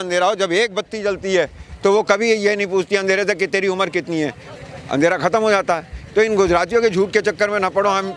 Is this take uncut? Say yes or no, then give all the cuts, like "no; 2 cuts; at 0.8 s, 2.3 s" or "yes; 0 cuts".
yes; 0 cuts